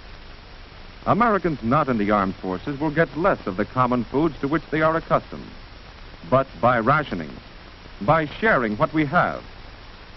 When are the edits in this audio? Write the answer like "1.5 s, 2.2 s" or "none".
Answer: 8.3 s